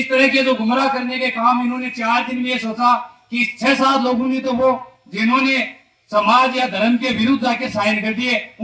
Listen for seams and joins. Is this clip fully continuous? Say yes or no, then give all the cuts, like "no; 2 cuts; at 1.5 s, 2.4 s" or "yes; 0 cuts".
yes; 0 cuts